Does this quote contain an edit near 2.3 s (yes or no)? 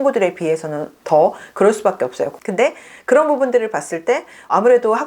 yes